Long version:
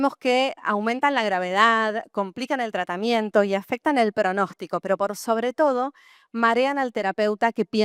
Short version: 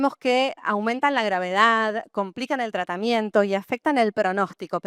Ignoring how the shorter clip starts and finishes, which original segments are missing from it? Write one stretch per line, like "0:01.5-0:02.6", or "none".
none

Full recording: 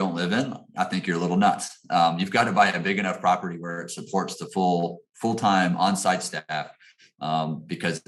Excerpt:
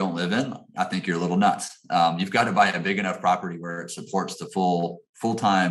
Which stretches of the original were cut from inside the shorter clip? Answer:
none

